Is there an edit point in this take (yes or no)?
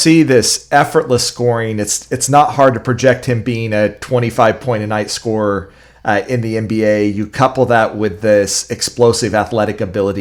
no